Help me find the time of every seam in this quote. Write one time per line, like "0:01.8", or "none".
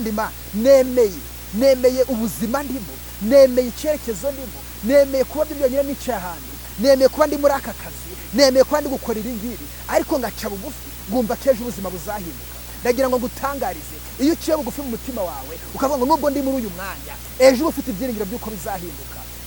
none